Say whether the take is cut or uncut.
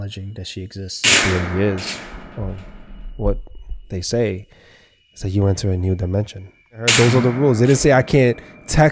cut